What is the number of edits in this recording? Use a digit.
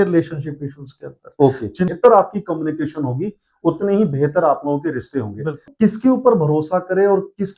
2